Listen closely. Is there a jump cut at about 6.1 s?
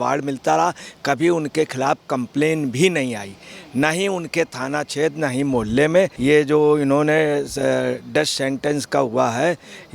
yes; 1 cut; at 6.1 s

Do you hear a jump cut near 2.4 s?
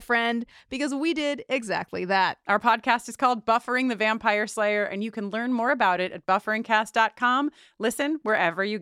yes; 1 cut; at 2.4 s

